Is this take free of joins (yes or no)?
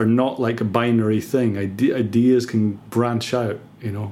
no